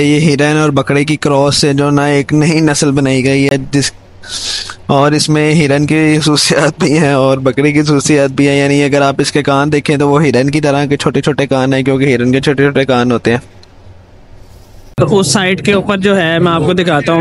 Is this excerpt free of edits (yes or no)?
yes